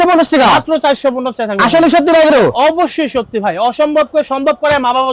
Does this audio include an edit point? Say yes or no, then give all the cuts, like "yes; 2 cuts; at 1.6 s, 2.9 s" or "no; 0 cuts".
no; 0 cuts